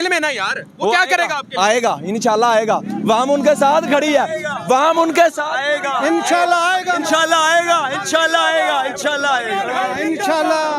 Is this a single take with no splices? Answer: yes; 0 cuts

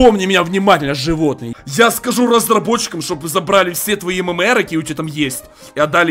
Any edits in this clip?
yes; 1 cut; at 1.5 s

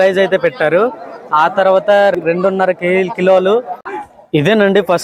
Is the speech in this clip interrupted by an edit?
yes; 2 cuts; at 2.2 s, 3.8 s

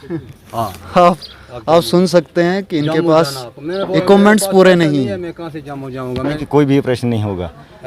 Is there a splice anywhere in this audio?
yes; 1 cut; at 6.4 s

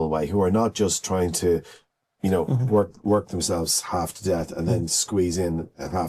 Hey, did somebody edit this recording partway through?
no; 0 cuts

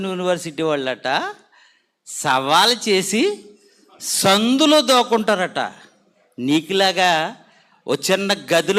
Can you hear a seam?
no; 0 cuts

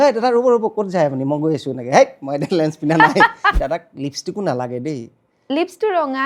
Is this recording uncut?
no; 1 cut; at 3.6 s

